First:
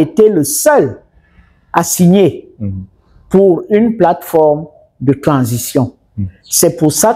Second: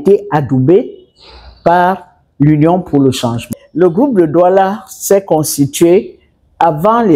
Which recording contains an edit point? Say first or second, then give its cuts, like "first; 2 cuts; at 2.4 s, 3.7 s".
second; 1 cut; at 3.6 s